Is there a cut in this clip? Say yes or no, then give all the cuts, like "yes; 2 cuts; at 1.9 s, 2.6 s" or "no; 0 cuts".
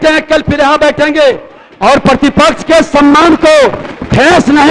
no; 0 cuts